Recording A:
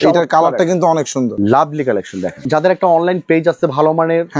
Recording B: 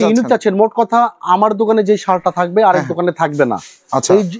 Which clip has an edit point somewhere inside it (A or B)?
A